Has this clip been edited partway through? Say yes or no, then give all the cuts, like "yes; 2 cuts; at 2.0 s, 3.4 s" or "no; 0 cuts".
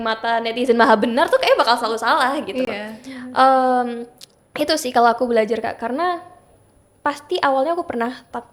no; 0 cuts